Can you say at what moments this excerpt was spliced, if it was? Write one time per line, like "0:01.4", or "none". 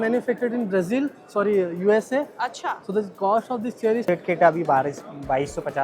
0:04.1